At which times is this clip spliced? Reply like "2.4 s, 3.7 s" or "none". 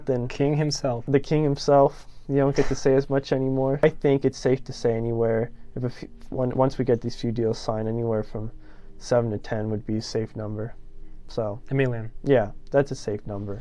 3.8 s